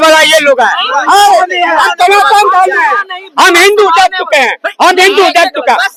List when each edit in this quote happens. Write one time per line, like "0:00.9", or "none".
none